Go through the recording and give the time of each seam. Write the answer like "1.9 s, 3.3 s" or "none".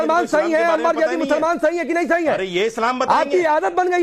none